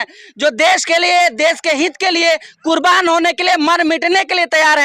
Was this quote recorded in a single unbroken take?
yes; 0 cuts

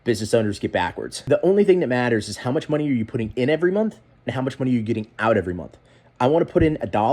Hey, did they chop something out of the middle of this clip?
yes; 1 cut; at 1.1 s

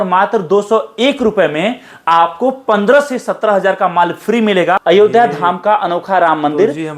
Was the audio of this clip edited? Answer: yes; 1 cut; at 4.8 s

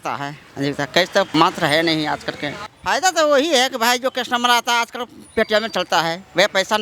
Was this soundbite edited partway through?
yes; 2 cuts; at 1.3 s, 2.5 s

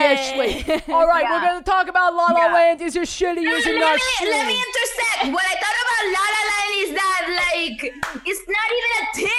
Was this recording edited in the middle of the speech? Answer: no; 0 cuts

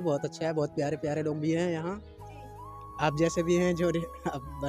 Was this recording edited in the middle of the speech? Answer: no; 0 cuts

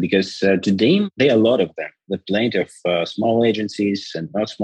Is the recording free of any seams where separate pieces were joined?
no; 1 cut; at 1.1 s

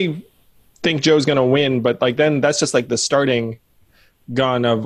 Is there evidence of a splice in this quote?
no; 0 cuts

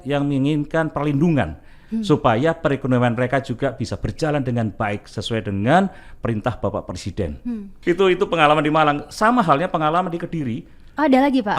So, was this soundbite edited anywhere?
no; 0 cuts

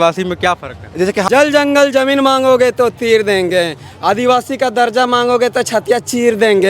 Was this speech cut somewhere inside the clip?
yes; 1 cut; at 1.3 s

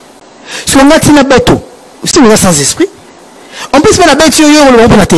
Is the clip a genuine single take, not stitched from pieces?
yes; 0 cuts

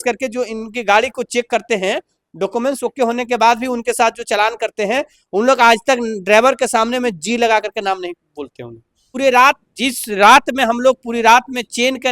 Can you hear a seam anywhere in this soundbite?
yes; 1 cut; at 9.0 s

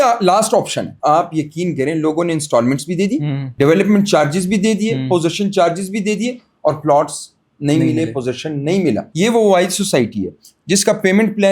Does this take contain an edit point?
yes; 1 cut; at 0.9 s

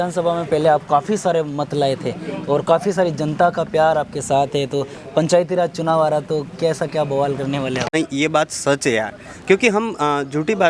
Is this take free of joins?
no; 1 cut; at 7.9 s

